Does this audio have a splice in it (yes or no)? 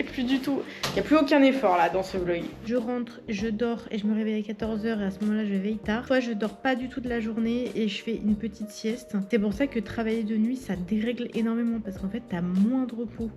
yes